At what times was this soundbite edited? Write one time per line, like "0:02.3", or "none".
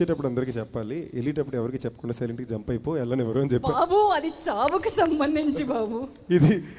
none